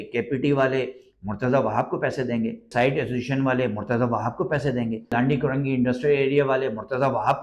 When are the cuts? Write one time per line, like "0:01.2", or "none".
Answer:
0:02.7
0:05.1

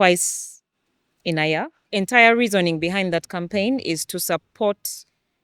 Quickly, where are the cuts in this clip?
0:01.8

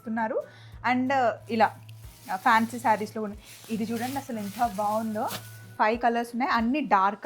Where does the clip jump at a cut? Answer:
0:05.7

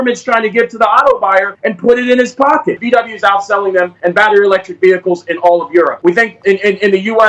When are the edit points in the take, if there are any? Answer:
0:01.6
0:02.8
0:03.9
0:05.9

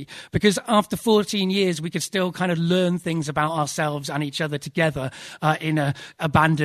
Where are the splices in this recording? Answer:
none

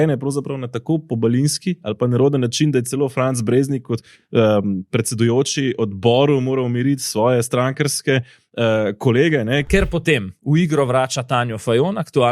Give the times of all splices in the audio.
0:09.6

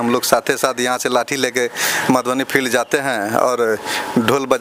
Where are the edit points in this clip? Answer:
none

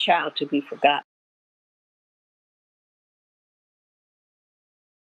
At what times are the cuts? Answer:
none

